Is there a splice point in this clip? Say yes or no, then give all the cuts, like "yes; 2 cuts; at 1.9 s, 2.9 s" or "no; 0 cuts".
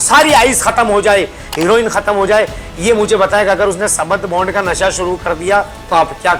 no; 0 cuts